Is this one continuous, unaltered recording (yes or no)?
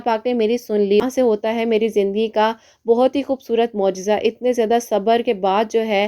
no